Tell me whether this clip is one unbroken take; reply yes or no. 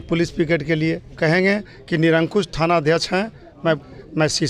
no